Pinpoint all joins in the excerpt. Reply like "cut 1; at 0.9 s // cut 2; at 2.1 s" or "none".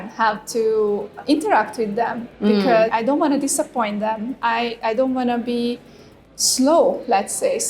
cut 1; at 1.2 s // cut 2; at 2.9 s // cut 3; at 6.2 s